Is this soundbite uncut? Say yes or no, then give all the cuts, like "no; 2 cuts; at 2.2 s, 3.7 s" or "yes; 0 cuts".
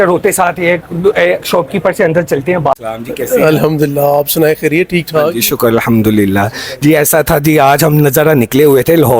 yes; 0 cuts